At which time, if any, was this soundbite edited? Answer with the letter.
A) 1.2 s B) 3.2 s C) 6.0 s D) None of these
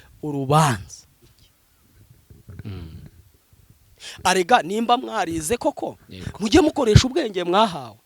A